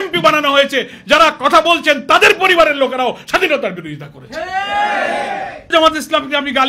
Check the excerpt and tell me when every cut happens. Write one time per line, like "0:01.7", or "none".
0:05.7